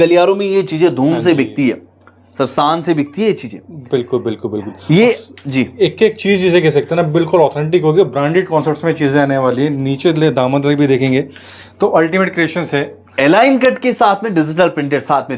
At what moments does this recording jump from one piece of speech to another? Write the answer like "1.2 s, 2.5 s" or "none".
none